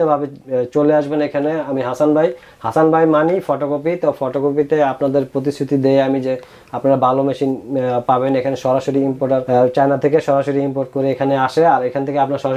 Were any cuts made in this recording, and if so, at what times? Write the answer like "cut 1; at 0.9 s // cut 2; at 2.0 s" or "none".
none